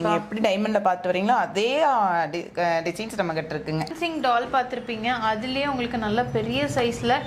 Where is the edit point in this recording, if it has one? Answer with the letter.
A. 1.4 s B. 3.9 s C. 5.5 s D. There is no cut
B